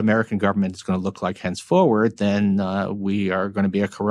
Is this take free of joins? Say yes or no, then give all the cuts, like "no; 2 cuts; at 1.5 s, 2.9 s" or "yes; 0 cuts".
yes; 0 cuts